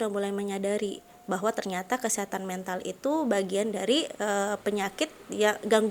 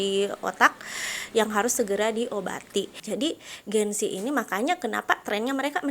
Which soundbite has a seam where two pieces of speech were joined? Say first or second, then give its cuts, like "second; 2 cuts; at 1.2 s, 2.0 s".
second; 1 cut; at 3.0 s